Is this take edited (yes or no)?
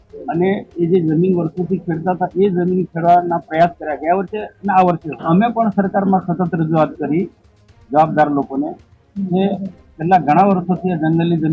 yes